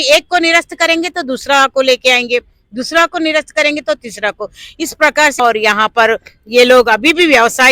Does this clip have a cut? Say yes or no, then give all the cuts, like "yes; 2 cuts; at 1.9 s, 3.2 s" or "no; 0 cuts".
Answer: yes; 1 cut; at 5.4 s